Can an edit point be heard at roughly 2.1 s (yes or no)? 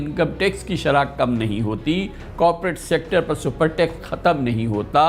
no